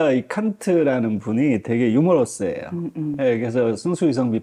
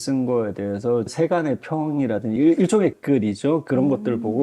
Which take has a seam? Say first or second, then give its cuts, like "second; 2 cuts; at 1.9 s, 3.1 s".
second; 3 cuts; at 1.1 s, 2.4 s, 3.0 s